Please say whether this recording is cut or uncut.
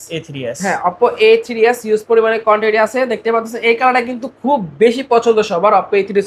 uncut